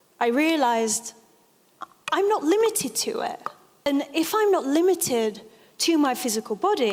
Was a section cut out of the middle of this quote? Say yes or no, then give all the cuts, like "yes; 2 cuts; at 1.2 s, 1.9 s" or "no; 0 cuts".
yes; 1 cut; at 3.9 s